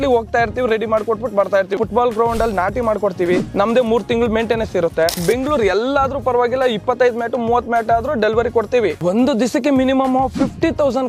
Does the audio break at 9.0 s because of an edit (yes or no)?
yes